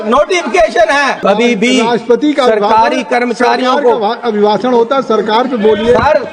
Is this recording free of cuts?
no; 1 cut; at 1.2 s

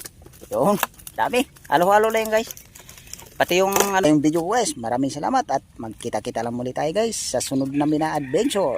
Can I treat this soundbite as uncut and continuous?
no; 1 cut; at 4.0 s

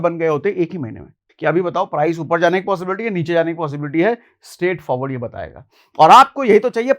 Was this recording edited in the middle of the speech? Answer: yes; 1 cut; at 1.2 s

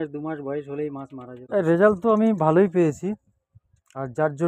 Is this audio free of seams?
no; 1 cut; at 1.4 s

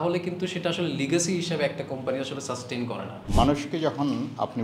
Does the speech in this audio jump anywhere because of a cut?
yes; 1 cut; at 3.2 s

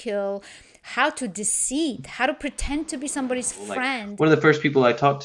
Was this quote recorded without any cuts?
no; 1 cut; at 4.0 s

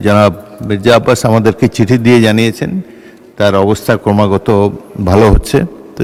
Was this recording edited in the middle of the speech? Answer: no; 0 cuts

